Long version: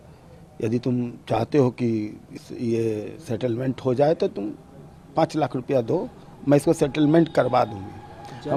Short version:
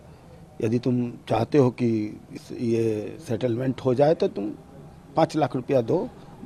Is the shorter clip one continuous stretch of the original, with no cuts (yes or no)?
yes